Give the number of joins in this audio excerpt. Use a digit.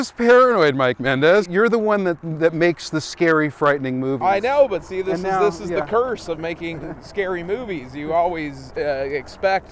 0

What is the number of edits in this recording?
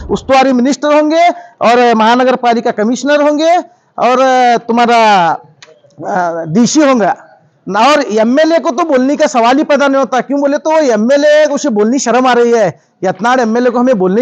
0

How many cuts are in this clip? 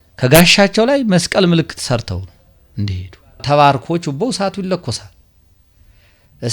1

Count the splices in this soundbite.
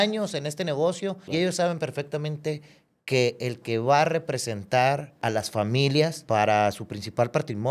3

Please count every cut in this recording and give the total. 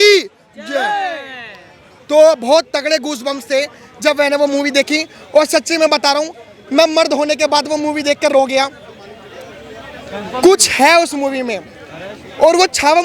0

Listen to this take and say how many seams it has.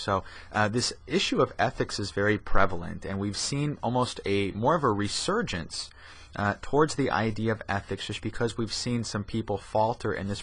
1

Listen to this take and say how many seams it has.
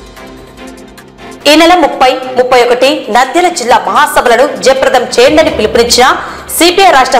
1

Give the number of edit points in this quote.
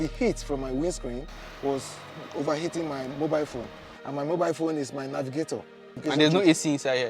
1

